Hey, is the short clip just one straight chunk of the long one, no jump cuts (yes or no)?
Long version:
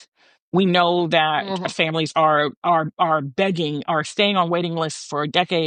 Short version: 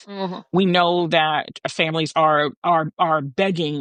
yes